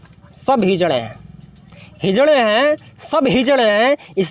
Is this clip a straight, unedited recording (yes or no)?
yes